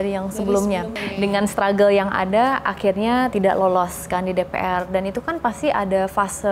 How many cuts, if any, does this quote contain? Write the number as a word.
two